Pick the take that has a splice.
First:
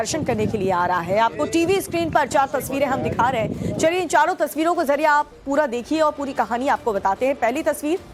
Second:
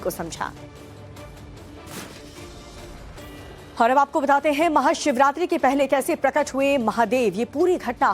second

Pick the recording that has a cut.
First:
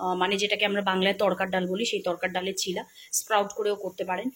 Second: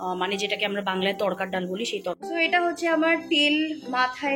second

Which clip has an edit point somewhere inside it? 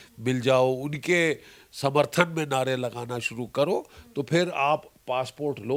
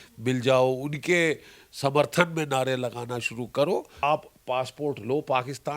second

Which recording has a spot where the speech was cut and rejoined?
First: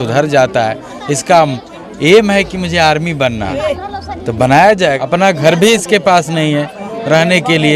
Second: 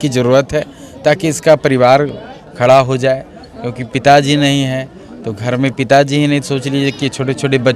first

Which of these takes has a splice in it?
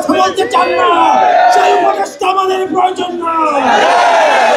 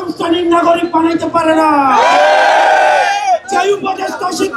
second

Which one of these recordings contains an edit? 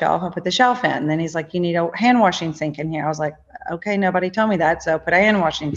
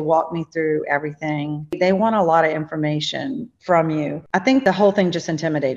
second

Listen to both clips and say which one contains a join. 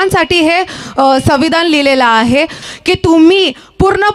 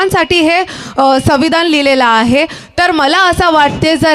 first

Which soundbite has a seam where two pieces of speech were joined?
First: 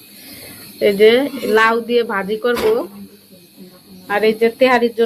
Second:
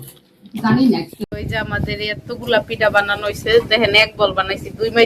second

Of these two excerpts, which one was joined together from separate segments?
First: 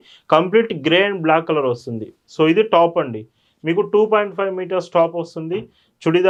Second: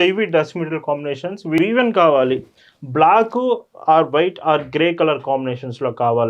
second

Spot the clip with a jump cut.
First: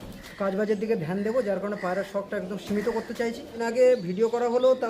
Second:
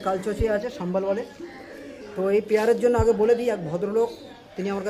first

